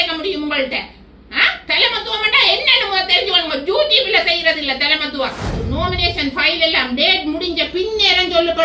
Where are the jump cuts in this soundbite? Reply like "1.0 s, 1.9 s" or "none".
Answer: 5.5 s